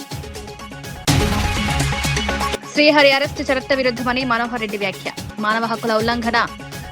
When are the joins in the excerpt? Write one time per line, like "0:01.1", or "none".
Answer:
0:01.0
0:02.5